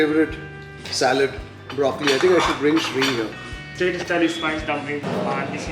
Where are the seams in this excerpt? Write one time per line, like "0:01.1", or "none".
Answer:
0:03.7